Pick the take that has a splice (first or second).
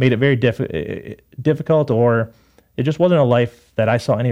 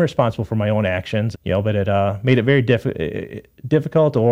second